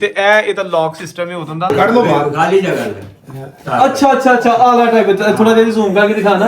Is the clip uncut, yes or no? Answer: no